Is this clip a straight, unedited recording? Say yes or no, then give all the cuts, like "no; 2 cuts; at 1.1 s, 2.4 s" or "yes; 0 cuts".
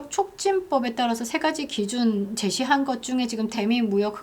yes; 0 cuts